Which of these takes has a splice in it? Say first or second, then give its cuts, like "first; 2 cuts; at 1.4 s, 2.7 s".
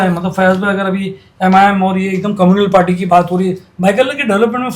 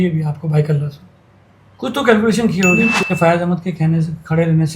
second; 1 cut; at 3.0 s